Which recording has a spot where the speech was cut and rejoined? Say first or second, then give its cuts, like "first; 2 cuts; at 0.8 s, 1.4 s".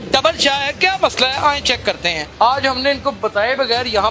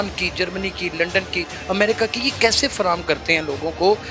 first; 1 cut; at 2.2 s